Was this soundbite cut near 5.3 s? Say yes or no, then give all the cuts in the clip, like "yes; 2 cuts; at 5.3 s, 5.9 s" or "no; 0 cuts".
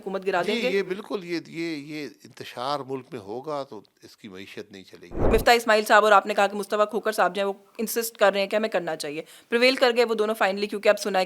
yes; 1 cut; at 5.3 s